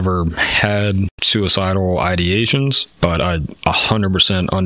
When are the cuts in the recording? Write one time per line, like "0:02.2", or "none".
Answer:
0:01.2
0:02.9